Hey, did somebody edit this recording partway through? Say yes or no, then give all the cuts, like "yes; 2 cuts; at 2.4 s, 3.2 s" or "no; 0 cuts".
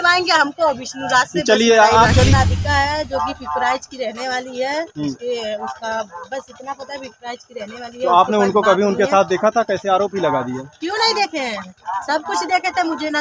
yes; 1 cut; at 2.3 s